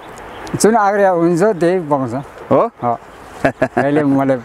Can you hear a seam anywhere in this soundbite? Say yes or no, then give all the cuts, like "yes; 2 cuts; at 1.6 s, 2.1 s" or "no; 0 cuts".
no; 0 cuts